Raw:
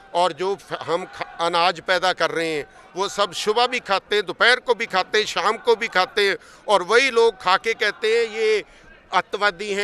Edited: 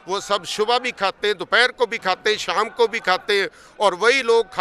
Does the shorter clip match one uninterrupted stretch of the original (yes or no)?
yes